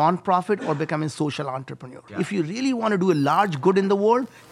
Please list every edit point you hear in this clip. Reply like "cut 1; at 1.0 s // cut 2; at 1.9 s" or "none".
cut 1; at 2.2 s

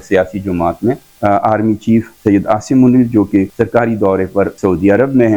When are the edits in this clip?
cut 1; at 1.1 s // cut 2; at 2.1 s // cut 3; at 3.5 s // cut 4; at 4.5 s

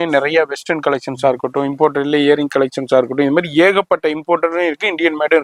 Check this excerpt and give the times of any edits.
none

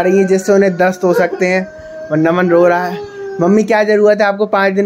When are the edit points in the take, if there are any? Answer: none

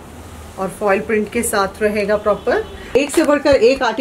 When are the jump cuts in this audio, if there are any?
cut 1; at 3.0 s

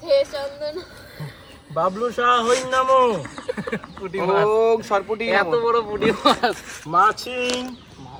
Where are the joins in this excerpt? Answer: none

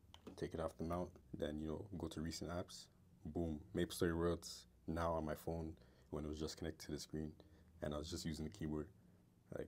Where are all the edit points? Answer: cut 1; at 1.2 s

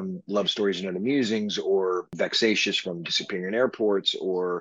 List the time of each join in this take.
cut 1; at 2.1 s

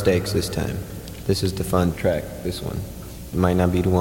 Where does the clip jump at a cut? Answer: cut 1; at 1.9 s

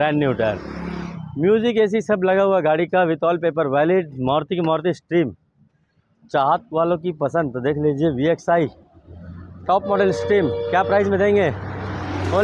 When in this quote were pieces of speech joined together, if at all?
none

